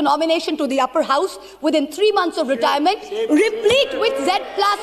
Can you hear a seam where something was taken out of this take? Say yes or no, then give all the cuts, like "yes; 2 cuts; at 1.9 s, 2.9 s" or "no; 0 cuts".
no; 0 cuts